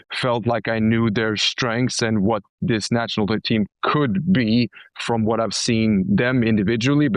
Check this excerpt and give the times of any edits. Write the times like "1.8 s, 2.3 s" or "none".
none